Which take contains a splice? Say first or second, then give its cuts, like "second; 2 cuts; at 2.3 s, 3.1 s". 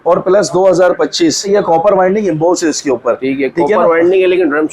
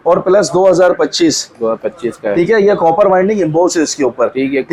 first; 1 cut; at 1.5 s